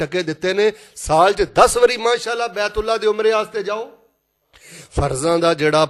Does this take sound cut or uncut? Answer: cut